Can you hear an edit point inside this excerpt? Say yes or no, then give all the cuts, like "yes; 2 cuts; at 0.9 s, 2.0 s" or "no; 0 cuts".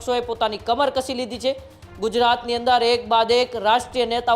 no; 0 cuts